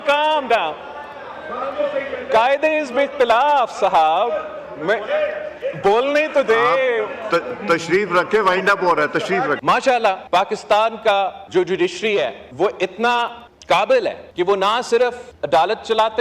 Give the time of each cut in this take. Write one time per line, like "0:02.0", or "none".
0:09.6
0:10.2
0:11.4
0:12.4
0:13.5
0:14.2
0:15.3